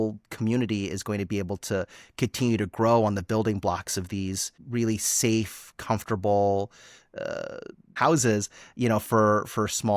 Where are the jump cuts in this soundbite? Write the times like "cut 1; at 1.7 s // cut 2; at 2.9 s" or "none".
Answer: cut 1; at 4.6 s // cut 2; at 8.0 s